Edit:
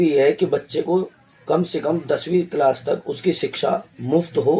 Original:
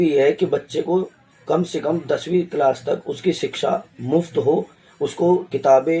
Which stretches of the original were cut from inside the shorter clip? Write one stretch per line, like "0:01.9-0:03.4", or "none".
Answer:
none